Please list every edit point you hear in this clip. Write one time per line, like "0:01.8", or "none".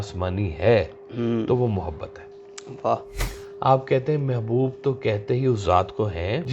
0:03.4

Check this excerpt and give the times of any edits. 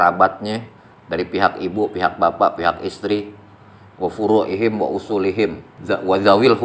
0:05.7

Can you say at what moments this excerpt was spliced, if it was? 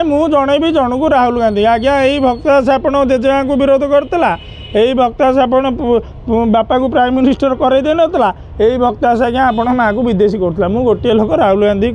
none

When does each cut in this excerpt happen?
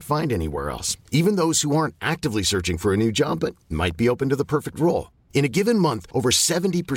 none

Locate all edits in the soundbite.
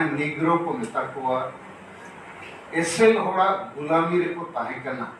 none

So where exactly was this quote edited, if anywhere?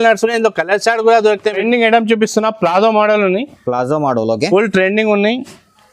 0:01.6

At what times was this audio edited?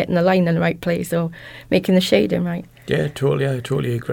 0:02.7

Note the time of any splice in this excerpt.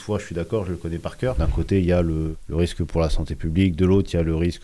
0:01.4

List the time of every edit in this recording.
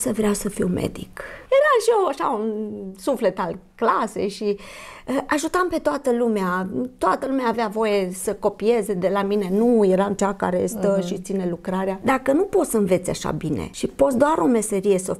0:01.3
0:12.0
0:13.7

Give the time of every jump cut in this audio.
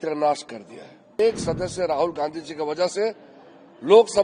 0:01.2

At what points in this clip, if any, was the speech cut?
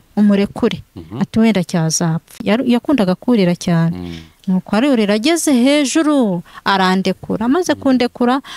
0:02.4

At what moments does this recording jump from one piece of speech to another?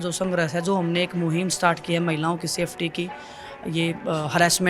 none

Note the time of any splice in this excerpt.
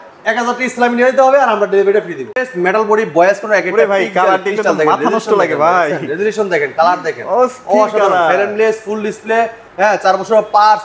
0:02.4

